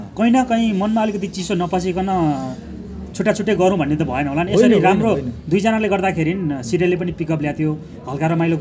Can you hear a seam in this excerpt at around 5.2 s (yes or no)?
no